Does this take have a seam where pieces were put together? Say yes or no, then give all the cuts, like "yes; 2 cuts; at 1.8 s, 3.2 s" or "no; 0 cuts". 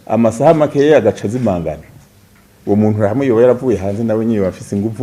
no; 0 cuts